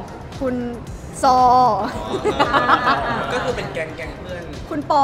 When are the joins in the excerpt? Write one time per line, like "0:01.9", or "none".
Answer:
none